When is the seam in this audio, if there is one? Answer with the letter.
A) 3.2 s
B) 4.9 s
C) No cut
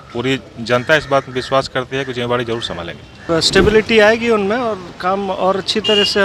A